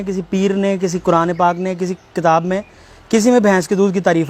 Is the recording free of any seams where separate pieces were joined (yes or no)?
yes